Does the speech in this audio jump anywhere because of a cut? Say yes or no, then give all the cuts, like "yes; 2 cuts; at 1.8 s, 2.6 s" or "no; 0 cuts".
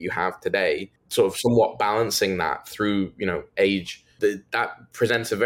yes; 2 cuts; at 1.0 s, 4.0 s